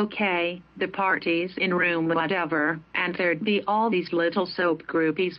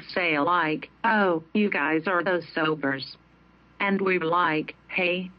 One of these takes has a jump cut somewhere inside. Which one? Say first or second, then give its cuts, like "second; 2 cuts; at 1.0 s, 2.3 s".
second; 1 cut; at 2.1 s